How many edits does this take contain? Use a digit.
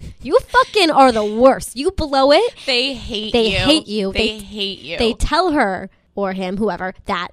1